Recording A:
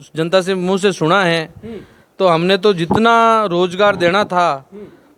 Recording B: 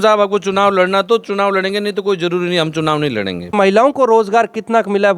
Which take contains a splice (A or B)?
B